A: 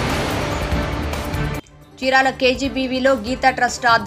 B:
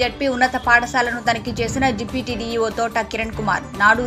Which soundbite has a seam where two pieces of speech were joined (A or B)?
A